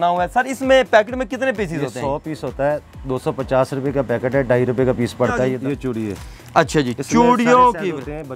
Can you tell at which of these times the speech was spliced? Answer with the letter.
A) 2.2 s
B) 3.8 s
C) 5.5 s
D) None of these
C